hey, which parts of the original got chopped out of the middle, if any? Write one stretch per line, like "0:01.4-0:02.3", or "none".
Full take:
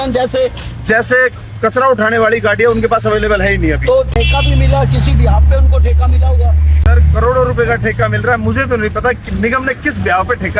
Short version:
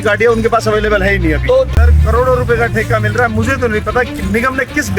0:04.1-0:06.8